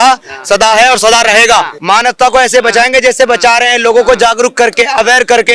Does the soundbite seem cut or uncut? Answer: cut